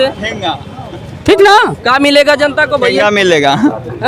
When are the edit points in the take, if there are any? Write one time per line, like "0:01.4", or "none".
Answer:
none